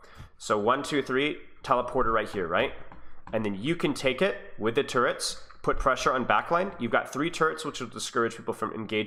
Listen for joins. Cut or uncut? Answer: uncut